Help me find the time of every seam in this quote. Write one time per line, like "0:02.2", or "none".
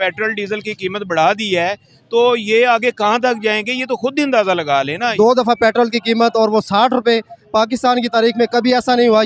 0:05.1